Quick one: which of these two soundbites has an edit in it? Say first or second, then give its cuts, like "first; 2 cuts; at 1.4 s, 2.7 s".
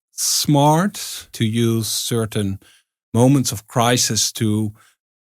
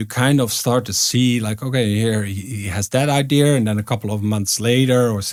first; 1 cut; at 1.3 s